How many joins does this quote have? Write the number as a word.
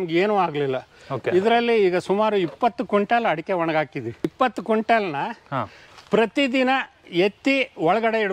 one